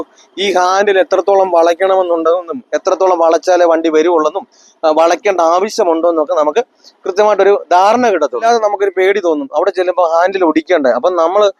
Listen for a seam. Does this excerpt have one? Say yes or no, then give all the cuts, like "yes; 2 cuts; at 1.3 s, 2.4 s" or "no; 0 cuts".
yes; 1 cut; at 8.4 s